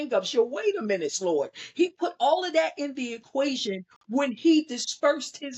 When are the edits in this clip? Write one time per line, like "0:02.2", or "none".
none